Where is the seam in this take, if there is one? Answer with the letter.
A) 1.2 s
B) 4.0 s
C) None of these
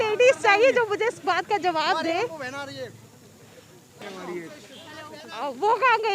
B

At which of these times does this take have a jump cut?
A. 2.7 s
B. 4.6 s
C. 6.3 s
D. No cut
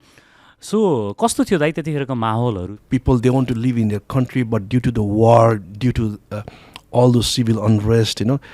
A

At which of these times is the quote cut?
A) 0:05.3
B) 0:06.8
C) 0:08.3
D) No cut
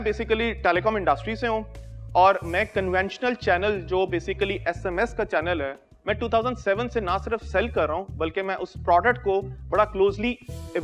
D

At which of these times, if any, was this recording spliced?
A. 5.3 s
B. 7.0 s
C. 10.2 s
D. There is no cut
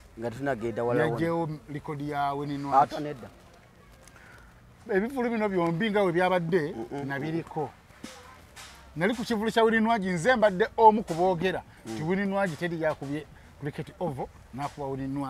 D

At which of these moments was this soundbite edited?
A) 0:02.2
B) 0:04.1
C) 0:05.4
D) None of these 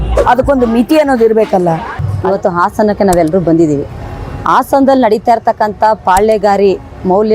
A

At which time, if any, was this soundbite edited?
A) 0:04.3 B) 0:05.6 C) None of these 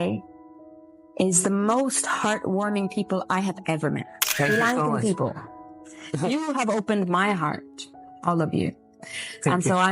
A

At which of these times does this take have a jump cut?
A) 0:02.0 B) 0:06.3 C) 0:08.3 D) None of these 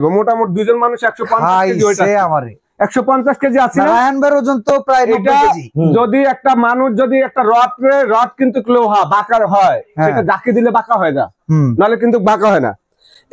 D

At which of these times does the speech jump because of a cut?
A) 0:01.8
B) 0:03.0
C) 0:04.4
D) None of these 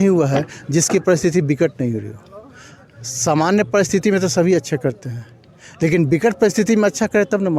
D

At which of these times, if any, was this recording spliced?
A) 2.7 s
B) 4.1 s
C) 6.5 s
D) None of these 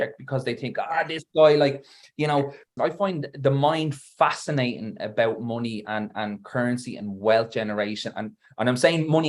A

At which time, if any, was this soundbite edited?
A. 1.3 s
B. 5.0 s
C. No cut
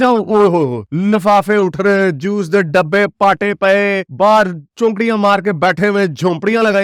C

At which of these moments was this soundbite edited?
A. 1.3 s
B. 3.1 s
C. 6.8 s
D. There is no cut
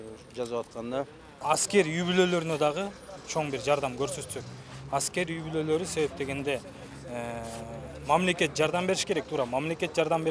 A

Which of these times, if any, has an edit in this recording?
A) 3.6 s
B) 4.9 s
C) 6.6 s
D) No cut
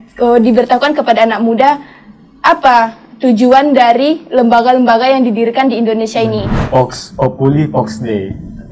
C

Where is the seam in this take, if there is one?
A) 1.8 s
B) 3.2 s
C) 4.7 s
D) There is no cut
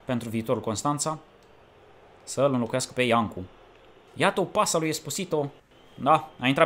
D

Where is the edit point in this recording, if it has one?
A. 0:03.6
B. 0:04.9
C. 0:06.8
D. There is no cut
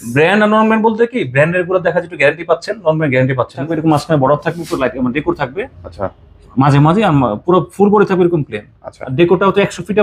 A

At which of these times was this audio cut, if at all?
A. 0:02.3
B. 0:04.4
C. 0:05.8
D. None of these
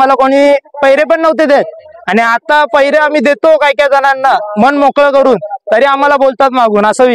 D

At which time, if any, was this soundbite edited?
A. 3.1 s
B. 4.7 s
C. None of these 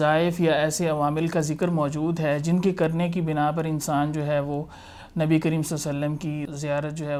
C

